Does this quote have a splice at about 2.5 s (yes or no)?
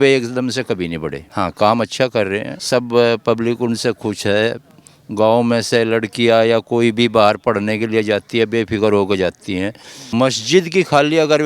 yes